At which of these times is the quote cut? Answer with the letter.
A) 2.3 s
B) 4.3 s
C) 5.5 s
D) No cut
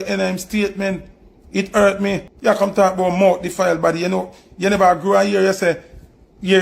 A